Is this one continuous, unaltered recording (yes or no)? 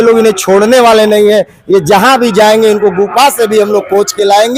yes